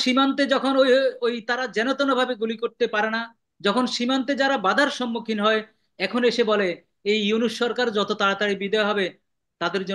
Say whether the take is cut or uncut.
uncut